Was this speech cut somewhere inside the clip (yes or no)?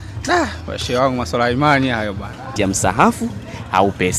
yes